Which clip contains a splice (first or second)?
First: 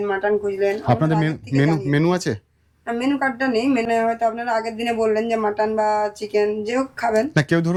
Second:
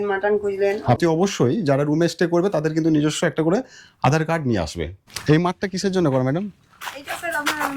second